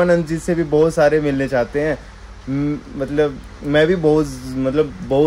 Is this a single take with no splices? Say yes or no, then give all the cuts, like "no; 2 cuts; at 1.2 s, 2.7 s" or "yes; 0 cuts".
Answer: yes; 0 cuts